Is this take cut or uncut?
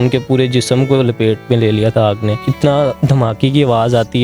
cut